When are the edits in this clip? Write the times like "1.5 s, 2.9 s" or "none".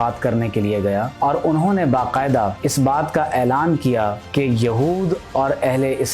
2.6 s